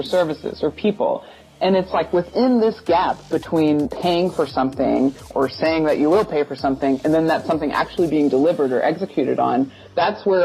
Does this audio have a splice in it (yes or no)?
yes